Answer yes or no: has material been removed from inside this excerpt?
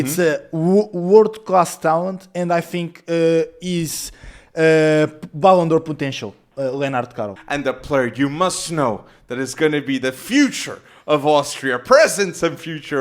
yes